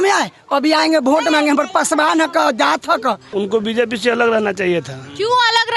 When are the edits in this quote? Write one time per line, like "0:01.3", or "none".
0:03.2